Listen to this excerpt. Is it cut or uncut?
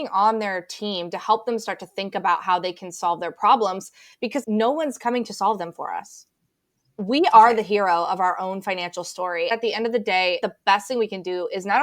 cut